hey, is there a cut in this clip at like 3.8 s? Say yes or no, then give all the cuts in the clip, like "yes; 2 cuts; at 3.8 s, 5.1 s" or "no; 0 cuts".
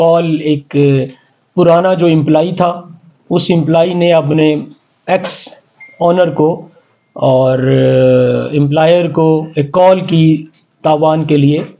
no; 0 cuts